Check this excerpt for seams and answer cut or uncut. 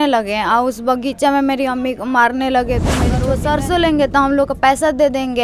cut